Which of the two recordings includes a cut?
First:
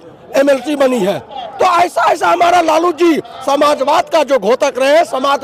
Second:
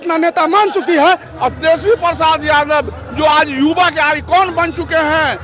second; 1 cut; at 1.3 s

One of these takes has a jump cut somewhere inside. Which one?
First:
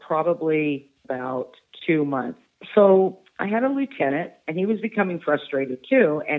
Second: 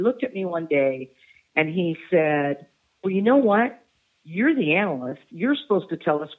first; 3 cuts; at 1.0 s, 2.4 s, 4.4 s

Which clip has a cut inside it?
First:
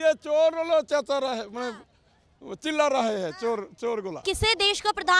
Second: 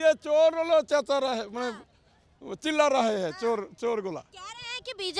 first; 1 cut; at 4.2 s

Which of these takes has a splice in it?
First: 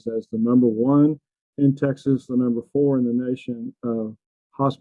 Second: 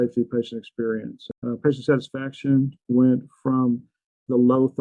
second; 1 cut; at 1.3 s

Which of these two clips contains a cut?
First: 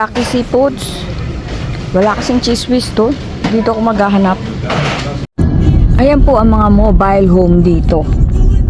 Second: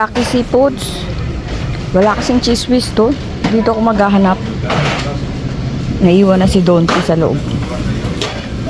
first; 1 cut; at 5.3 s

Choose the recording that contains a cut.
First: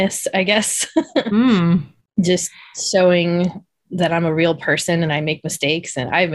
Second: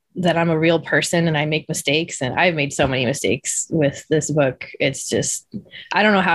first; 1 cut; at 2.0 s

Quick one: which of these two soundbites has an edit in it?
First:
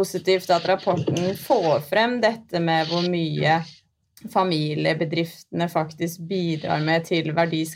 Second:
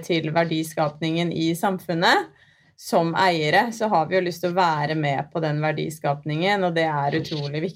second; 1 cut; at 2.7 s

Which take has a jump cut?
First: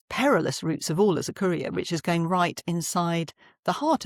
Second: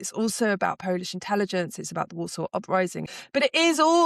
second; 1 cut; at 3.1 s

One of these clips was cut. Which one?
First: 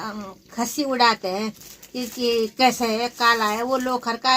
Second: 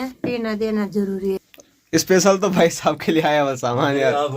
second; 1 cut; at 1.4 s

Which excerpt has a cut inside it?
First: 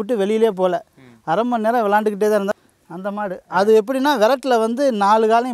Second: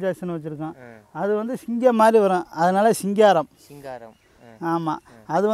first; 1 cut; at 2.5 s

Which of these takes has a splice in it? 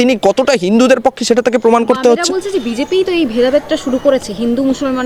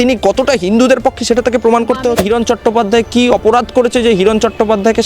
second; 1 cut; at 2.2 s

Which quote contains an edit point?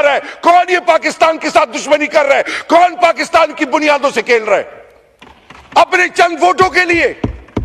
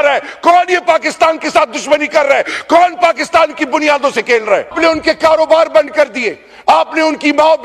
second; 1 cut; at 4.7 s

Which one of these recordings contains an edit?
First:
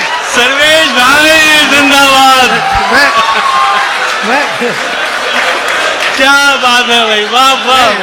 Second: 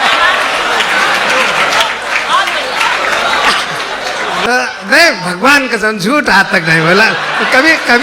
second; 1 cut; at 4.4 s

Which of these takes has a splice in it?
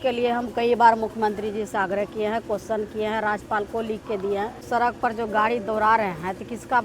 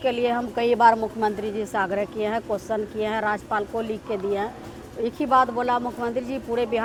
first; 1 cut; at 4.6 s

